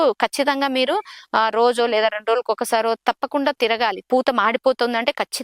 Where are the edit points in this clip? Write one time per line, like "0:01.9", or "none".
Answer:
0:04.0